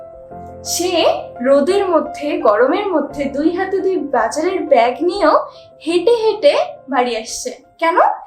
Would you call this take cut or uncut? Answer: uncut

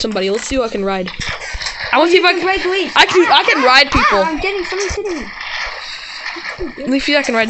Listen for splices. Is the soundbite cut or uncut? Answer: cut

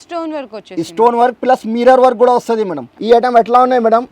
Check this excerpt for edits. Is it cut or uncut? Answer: cut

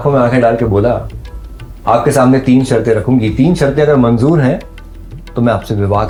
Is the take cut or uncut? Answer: uncut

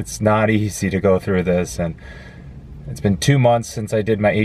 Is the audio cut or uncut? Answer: uncut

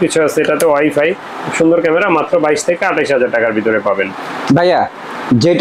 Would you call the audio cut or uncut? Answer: uncut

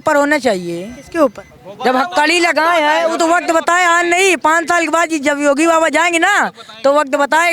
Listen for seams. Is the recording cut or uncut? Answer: uncut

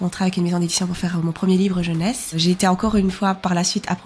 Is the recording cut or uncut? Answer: cut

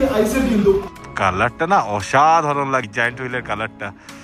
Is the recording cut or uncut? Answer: cut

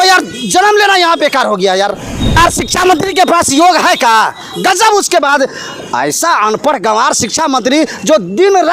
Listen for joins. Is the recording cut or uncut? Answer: cut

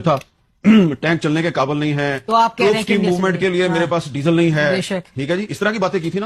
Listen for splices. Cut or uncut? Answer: uncut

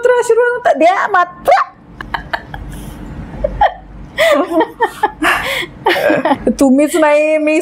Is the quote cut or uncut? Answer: uncut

